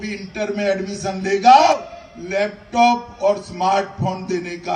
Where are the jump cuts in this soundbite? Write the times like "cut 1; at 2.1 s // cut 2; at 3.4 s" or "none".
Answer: cut 1; at 1.7 s

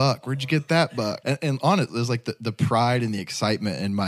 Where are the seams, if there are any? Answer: cut 1; at 1.2 s

